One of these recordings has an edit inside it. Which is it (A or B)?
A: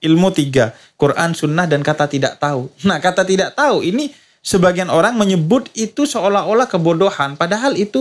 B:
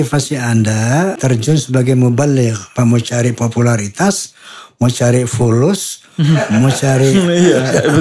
B